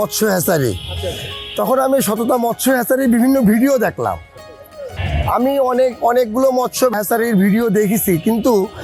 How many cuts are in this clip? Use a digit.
0